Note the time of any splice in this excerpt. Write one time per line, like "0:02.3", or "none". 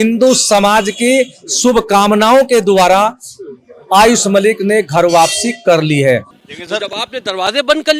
0:06.4

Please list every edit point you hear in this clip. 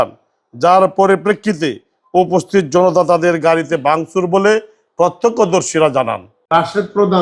0:06.3

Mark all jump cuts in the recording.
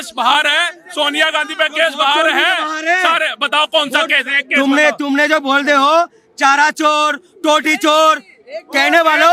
none

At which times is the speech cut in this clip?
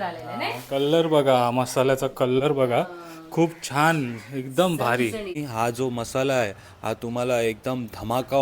0:05.4

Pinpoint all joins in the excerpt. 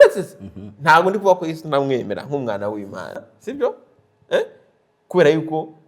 0:03.4

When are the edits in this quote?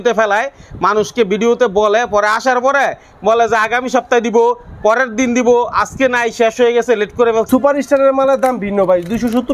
0:07.5

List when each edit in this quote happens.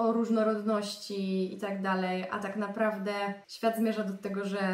none

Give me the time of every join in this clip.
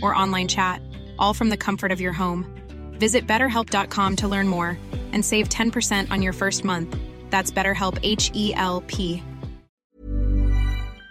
0:09.8

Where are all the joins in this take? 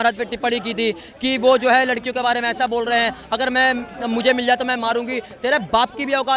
none

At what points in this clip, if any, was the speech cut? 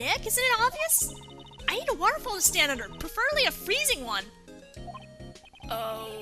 0:04.6

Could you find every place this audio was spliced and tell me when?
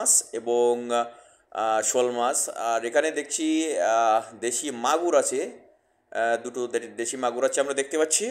none

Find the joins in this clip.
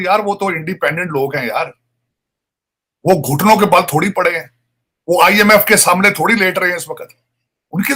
none

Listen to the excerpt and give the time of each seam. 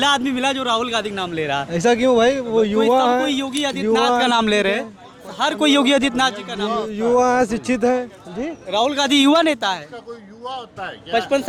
none

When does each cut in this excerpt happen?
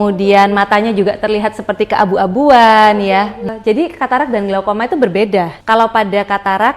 0:03.5
0:05.6

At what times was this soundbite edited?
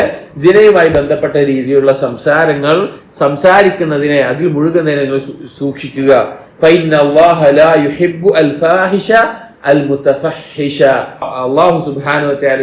0:11.3

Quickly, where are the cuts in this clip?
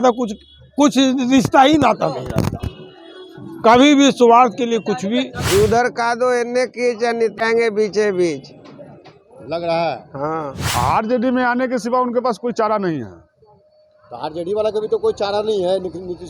0:05.4
0:10.6

